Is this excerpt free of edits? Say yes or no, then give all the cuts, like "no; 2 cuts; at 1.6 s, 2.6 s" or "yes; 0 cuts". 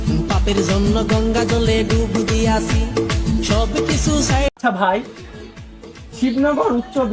no; 1 cut; at 4.5 s